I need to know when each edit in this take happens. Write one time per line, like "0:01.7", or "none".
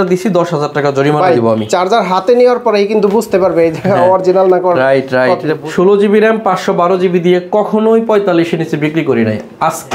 0:05.6